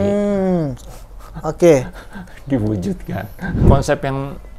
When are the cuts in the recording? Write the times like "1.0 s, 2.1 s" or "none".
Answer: 3.6 s